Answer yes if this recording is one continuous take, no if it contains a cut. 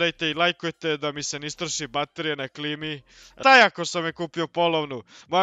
no